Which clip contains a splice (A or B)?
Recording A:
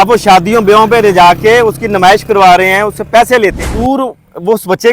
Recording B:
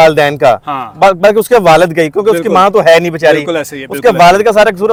A